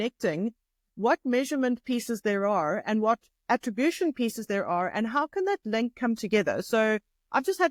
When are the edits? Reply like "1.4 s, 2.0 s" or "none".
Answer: none